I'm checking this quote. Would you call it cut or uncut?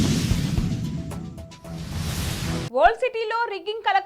cut